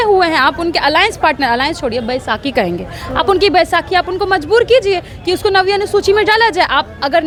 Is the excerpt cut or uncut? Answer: uncut